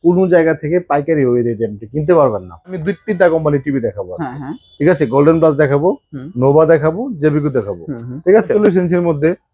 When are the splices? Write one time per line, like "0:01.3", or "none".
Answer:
0:02.8
0:08.5